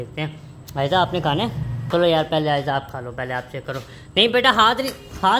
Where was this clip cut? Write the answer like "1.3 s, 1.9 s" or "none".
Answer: 1.7 s